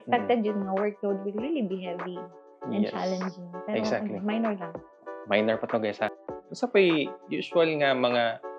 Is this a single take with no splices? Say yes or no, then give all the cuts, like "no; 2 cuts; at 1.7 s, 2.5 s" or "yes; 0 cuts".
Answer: no; 1 cut; at 6.2 s